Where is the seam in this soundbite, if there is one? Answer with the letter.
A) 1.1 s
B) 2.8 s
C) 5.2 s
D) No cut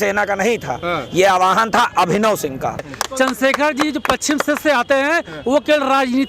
B